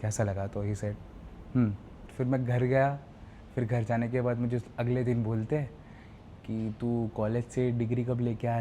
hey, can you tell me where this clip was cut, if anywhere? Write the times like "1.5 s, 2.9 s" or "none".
2.1 s